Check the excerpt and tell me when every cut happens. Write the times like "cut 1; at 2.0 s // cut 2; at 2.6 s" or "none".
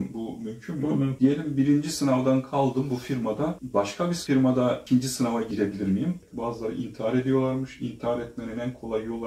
cut 1; at 1.2 s // cut 2; at 6.2 s